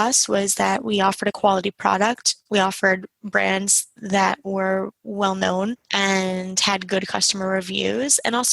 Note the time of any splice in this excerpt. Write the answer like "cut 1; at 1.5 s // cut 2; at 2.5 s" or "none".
cut 1; at 5.8 s